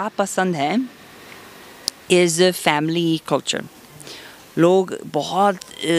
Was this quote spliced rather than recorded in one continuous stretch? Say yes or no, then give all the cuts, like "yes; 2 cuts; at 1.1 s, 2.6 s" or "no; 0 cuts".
no; 0 cuts